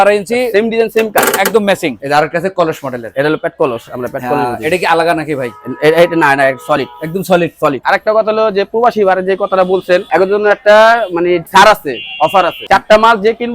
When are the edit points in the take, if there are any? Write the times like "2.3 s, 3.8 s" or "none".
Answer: 2.0 s, 7.8 s, 10.1 s, 12.6 s